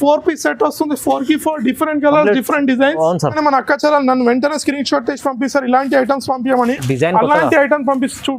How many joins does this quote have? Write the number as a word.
one